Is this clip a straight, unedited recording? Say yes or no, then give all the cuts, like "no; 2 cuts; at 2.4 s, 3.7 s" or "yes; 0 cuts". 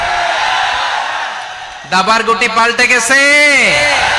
yes; 0 cuts